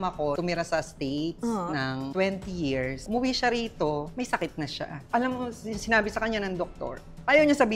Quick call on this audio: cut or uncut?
cut